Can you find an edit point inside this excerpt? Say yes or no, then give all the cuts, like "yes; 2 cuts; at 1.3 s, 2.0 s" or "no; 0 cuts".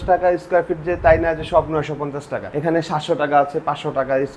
no; 0 cuts